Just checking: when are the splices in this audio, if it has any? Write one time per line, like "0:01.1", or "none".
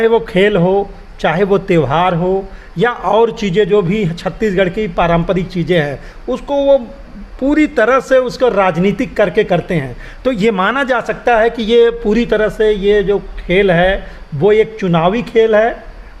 none